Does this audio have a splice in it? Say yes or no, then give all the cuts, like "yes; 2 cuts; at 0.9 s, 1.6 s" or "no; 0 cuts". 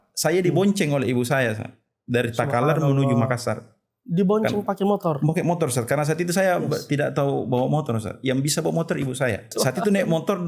yes; 1 cut; at 9.5 s